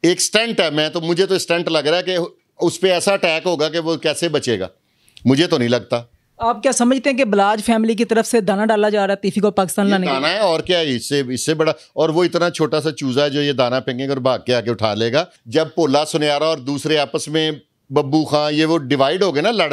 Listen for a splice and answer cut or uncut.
cut